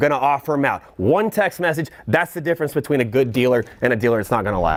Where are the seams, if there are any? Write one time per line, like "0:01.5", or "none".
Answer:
none

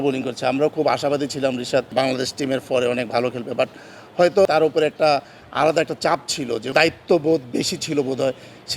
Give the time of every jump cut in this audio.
0:01.9
0:04.5
0:06.6

